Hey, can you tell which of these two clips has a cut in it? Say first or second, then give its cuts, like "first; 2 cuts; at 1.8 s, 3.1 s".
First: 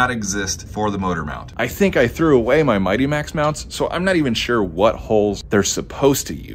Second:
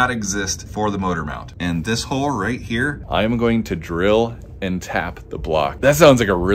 second; 3 cuts; at 1.5 s, 3.0 s, 5.8 s